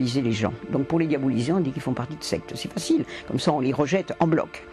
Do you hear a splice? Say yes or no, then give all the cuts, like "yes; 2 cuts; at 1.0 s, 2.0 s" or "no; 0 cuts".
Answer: no; 0 cuts